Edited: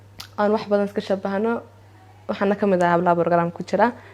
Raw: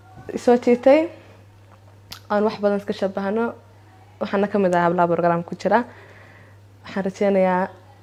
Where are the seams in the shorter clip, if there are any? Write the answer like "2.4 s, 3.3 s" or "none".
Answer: none